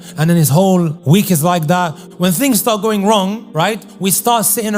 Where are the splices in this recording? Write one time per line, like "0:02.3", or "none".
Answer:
0:01.0
0:02.0
0:03.8